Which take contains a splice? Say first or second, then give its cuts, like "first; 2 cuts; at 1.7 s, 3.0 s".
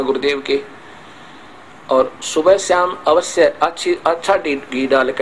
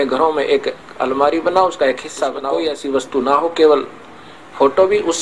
second; 1 cut; at 2.4 s